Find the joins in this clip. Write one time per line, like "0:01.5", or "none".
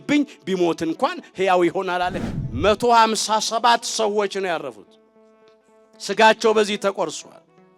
0:02.2